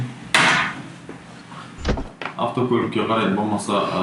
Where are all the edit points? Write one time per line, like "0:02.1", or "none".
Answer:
0:01.8